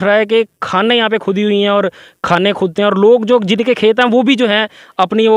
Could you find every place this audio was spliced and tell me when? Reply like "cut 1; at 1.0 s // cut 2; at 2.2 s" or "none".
none